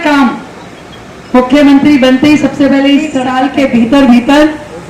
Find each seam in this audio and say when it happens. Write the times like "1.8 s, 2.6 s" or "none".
3.2 s